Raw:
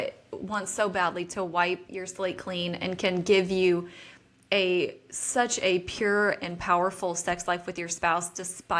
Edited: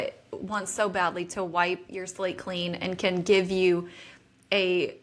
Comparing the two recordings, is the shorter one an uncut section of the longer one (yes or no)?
yes